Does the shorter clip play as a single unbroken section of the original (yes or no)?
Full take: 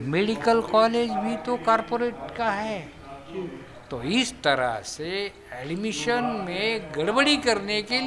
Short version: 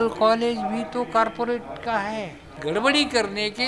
no